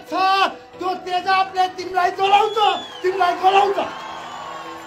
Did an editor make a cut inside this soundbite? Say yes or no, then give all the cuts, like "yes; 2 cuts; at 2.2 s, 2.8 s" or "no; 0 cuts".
no; 0 cuts